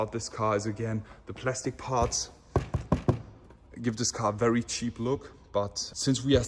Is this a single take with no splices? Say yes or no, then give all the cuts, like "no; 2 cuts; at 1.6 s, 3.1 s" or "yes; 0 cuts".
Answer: yes; 0 cuts